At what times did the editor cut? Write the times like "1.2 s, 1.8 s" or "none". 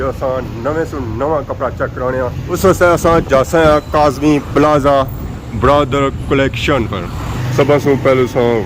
7.2 s